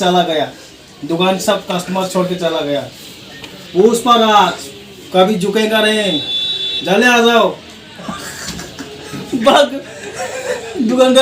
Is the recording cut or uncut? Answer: cut